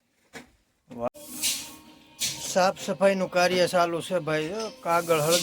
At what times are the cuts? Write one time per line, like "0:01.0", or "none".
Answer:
0:01.1